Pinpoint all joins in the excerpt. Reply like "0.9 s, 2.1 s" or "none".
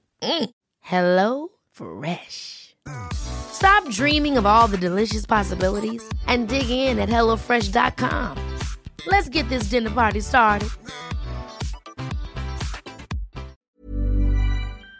13.6 s